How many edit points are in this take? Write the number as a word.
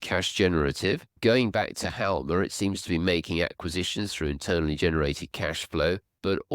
one